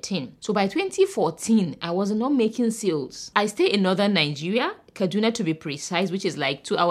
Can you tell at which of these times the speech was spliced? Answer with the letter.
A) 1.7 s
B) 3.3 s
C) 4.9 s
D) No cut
B